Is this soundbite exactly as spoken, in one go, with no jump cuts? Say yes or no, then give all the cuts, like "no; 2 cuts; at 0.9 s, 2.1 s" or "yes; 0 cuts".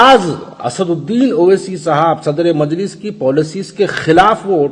yes; 0 cuts